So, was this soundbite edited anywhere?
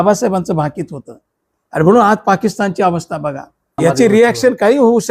yes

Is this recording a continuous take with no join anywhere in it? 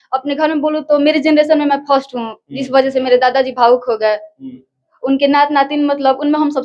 yes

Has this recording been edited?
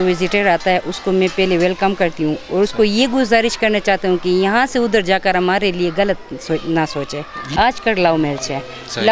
yes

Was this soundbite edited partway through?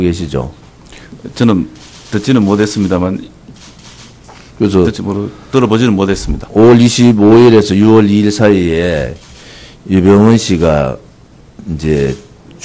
yes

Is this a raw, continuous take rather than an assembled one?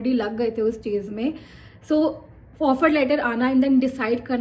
yes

